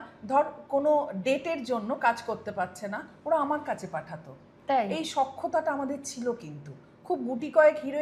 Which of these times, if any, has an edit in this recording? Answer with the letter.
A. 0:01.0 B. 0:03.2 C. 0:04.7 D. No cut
D